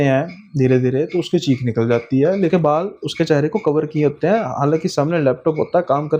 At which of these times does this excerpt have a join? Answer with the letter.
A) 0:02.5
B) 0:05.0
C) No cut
A